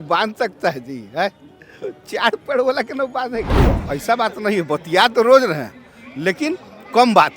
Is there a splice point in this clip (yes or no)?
yes